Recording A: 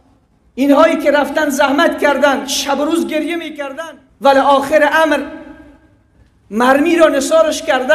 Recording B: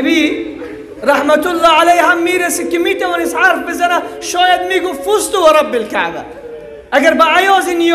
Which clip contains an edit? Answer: A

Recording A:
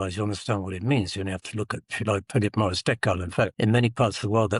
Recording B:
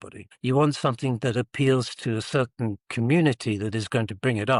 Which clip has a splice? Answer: A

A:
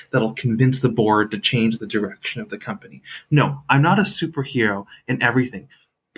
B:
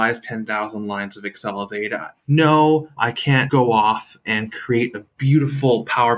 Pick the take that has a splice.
B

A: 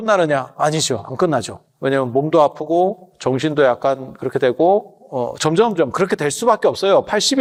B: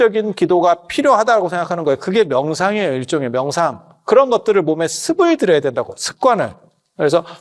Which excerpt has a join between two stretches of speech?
B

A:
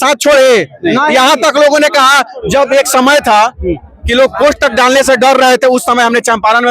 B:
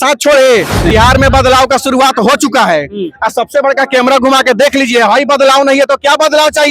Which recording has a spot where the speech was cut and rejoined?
B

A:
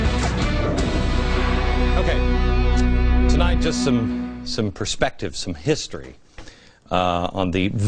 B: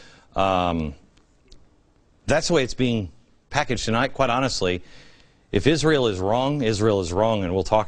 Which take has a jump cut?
B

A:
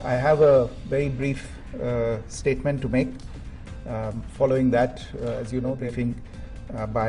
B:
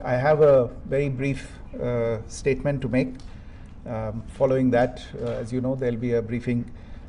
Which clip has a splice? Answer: A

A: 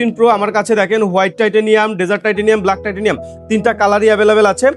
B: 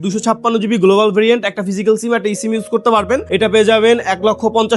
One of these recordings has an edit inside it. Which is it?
B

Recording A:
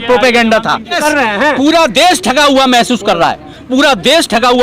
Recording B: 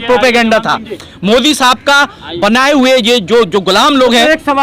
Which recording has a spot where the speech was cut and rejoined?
A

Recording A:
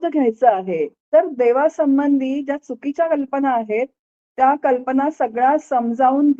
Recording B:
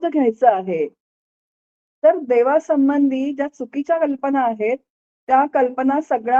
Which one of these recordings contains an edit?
A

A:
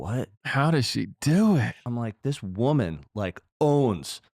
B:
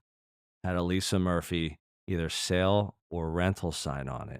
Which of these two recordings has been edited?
A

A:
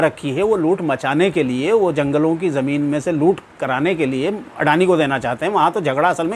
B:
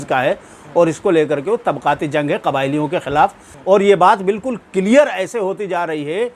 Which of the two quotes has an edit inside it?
B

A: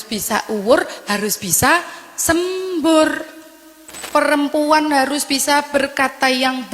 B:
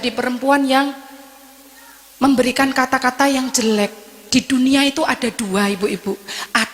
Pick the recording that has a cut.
A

